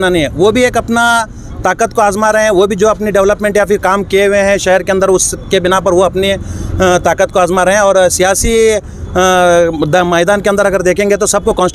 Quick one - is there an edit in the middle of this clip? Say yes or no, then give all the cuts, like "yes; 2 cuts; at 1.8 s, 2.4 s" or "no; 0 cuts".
no; 0 cuts